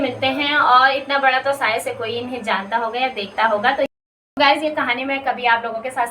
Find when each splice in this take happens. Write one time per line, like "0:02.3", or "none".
0:03.9